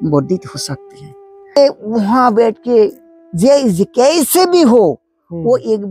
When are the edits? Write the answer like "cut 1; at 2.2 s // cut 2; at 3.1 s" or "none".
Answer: cut 1; at 1.6 s